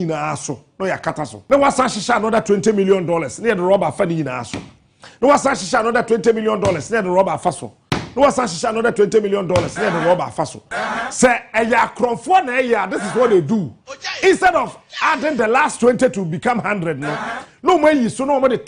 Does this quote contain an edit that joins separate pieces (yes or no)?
yes